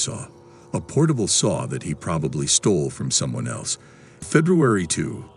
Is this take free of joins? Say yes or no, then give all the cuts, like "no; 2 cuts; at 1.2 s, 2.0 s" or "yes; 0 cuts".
no; 1 cut; at 4.2 s